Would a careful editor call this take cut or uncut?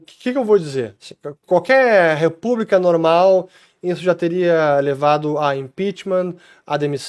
uncut